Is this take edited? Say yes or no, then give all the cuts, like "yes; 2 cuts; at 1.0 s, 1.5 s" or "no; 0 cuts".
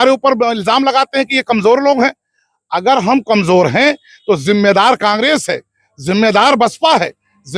no; 0 cuts